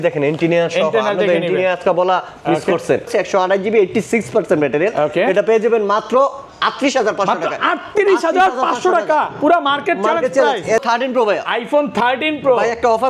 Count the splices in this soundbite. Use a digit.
2